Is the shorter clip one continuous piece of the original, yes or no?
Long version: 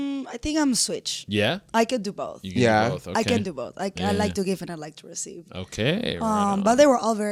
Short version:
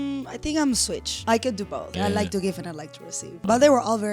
no